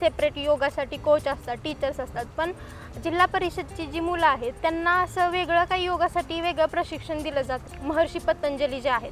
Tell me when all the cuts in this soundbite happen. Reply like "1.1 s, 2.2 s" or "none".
7.7 s